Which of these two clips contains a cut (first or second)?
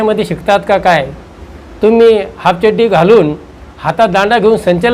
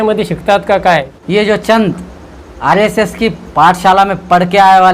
second